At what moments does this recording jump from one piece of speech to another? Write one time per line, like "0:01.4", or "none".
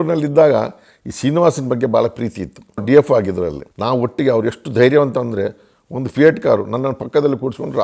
none